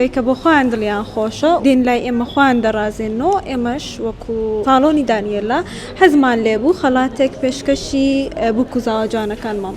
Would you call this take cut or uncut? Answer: cut